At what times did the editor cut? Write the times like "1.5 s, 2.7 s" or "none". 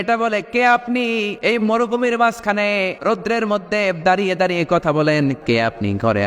1.3 s, 3.0 s, 5.4 s